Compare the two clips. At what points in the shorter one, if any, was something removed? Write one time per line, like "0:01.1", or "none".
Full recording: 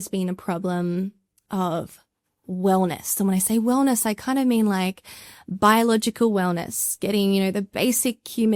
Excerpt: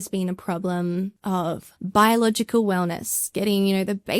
0:01.4